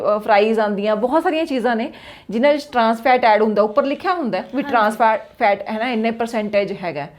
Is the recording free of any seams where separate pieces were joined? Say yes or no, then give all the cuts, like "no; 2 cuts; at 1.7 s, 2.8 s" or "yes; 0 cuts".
yes; 0 cuts